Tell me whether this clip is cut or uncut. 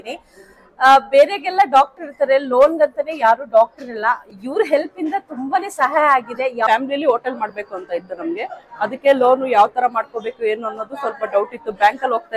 cut